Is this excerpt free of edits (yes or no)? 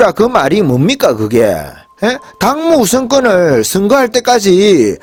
yes